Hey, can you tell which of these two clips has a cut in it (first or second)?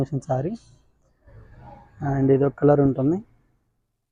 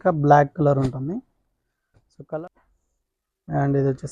second